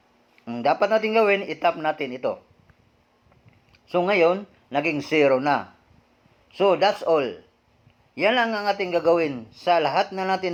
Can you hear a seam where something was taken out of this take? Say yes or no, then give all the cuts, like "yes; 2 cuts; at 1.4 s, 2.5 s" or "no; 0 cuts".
no; 0 cuts